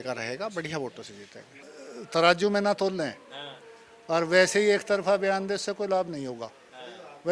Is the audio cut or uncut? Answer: cut